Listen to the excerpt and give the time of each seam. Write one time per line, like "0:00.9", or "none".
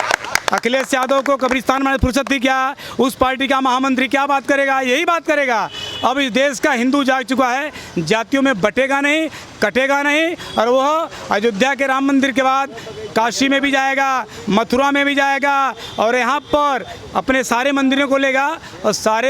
none